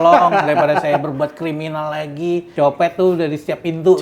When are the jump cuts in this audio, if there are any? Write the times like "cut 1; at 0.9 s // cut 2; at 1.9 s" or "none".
cut 1; at 2.5 s